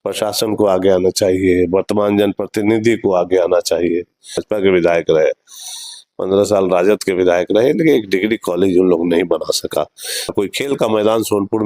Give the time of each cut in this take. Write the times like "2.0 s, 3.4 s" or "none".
4.5 s, 10.3 s